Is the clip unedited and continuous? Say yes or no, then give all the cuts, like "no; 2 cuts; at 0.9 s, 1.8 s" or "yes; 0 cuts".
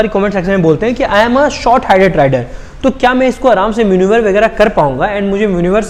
yes; 0 cuts